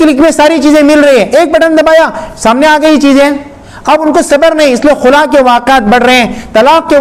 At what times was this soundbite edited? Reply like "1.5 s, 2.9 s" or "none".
none